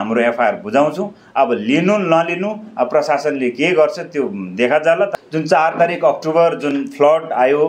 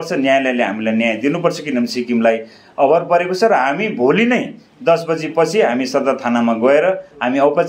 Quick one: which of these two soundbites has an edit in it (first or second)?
first